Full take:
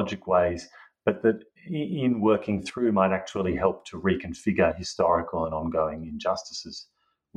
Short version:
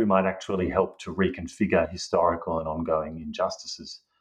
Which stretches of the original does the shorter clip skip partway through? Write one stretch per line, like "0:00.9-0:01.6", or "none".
none